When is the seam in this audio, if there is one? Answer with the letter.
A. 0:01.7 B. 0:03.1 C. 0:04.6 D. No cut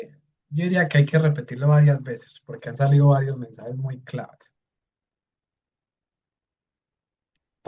D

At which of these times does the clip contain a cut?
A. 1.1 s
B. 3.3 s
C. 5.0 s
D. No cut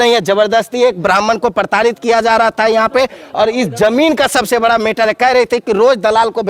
D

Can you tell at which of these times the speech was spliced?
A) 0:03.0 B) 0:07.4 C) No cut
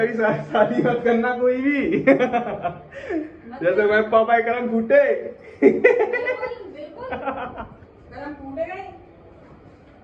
C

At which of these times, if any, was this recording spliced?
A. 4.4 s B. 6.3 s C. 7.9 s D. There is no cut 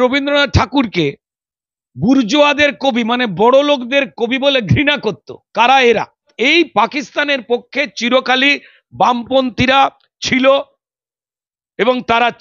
B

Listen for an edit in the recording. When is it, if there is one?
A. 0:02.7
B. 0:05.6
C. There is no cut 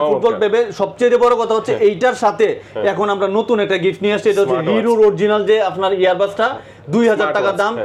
C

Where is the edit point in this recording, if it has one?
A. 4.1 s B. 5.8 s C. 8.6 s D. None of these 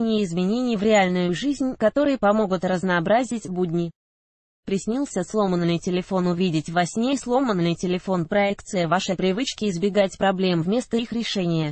D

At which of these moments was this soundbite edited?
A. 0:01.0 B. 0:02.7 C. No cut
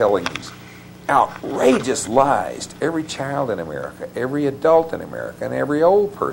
C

